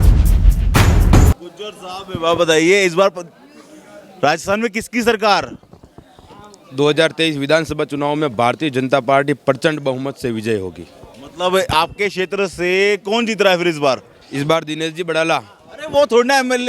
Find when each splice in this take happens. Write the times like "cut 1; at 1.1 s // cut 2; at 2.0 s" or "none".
cut 1; at 1.3 s